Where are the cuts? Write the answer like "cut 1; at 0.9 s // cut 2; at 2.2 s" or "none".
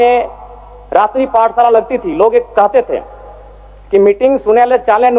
none